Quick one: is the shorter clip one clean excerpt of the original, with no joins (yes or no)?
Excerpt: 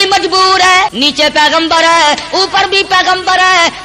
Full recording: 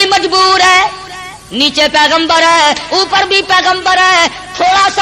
no